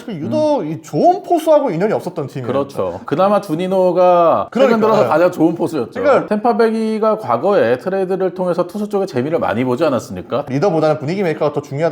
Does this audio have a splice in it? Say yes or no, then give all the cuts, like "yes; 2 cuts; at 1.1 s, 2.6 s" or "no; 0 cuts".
yes; 2 cuts; at 6.3 s, 10.5 s